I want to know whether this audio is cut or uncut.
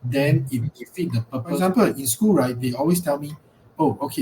cut